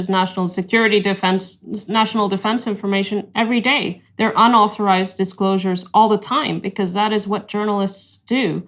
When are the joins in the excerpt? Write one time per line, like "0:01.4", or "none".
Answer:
none